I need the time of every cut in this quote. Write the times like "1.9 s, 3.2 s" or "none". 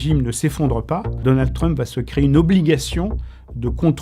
1.1 s